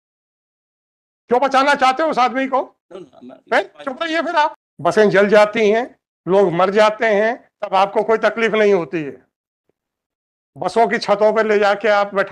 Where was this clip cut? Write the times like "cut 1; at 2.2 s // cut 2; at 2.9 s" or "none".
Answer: cut 1; at 4.7 s